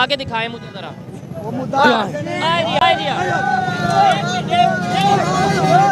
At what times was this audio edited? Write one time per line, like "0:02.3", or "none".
0:02.8